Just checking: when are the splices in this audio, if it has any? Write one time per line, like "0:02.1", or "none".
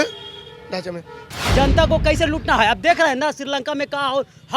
0:01.2